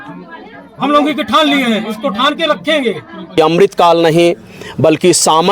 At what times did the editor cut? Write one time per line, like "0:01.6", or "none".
0:03.4

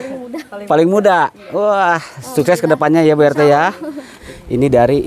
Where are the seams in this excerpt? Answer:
0:04.2

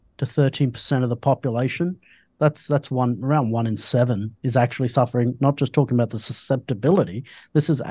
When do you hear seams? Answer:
none

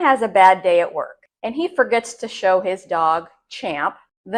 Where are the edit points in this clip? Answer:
none

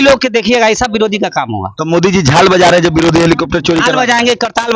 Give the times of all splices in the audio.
none

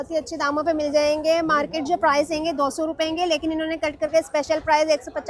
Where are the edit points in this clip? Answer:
none

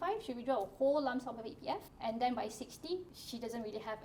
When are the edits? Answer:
0:01.9
0:03.2

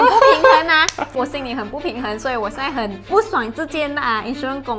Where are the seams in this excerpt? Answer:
0:01.1
0:03.1

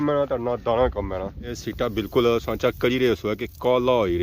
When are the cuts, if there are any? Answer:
0:01.5

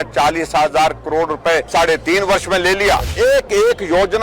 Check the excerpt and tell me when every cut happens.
0:01.7
0:03.1

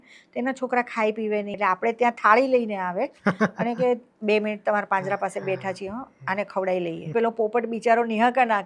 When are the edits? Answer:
0:01.6
0:07.1

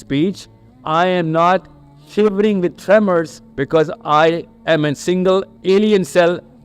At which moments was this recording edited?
0:03.4
0:04.5
0:05.5

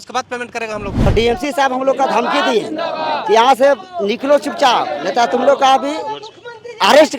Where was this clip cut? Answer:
0:01.1

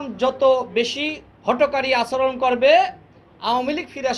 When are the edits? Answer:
none

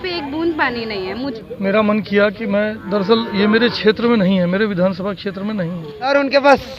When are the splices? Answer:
0:01.2
0:06.1

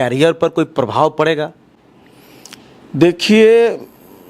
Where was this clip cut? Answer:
none

